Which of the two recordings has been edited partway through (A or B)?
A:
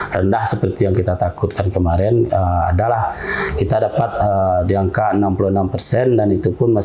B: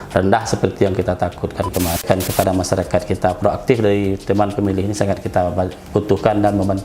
B